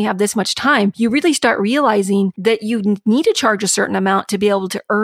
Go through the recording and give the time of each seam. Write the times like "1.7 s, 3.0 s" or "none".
0.9 s, 2.4 s